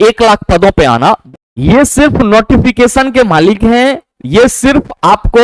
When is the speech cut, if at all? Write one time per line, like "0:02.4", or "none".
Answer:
0:01.2